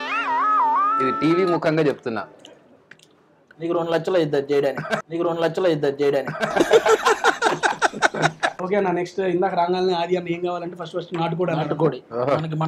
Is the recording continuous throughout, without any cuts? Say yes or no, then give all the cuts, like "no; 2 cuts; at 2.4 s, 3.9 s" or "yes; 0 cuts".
yes; 0 cuts